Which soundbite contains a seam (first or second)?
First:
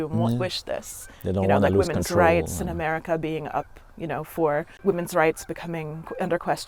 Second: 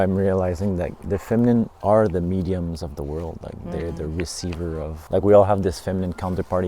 second